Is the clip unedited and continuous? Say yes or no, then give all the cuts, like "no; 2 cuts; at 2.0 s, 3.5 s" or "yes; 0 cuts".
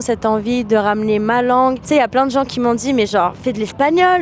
no; 1 cut; at 1.8 s